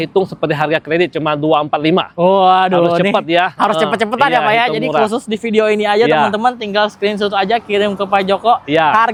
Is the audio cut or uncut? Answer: uncut